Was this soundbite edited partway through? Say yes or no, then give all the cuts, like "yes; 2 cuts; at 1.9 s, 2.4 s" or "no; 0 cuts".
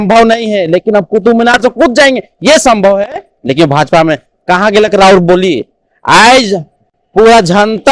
no; 0 cuts